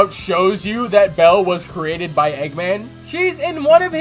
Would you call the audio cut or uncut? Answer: uncut